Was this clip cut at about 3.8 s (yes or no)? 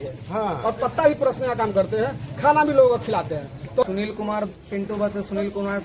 yes